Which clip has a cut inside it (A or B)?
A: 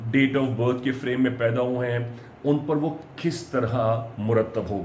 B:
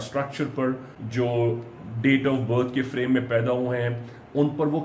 B